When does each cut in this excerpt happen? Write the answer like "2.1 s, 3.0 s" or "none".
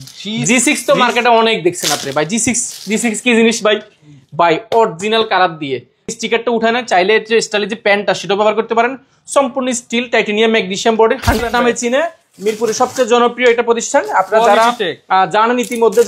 6.1 s, 11.4 s